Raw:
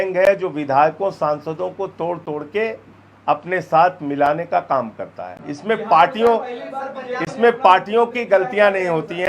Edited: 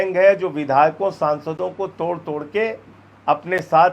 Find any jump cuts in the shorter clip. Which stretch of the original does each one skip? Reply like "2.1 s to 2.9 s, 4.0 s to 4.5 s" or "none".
none